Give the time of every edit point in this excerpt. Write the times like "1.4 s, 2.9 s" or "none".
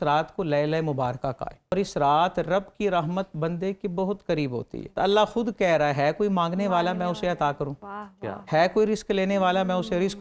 1.7 s, 4.9 s